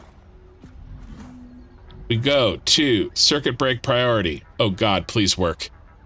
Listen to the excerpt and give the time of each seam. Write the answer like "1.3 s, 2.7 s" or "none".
1.8 s